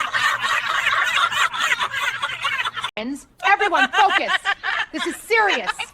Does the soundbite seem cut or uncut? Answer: cut